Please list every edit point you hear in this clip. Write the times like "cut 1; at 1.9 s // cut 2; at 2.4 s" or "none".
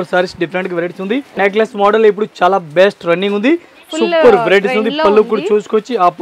cut 1; at 1.3 s

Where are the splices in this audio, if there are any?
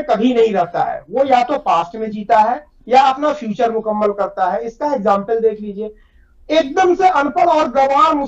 none

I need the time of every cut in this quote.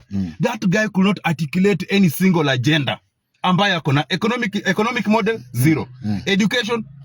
none

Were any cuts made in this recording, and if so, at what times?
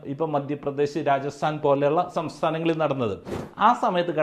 cut 1; at 3.3 s

